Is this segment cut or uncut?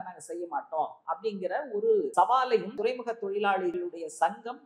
cut